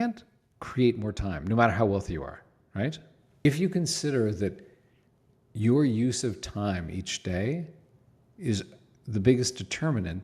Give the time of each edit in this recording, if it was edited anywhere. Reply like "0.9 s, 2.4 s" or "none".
3.5 s